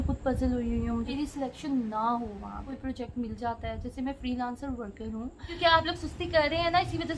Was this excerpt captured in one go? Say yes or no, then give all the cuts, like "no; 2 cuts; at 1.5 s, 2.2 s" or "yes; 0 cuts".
no; 3 cuts; at 1.1 s, 2.7 s, 5.5 s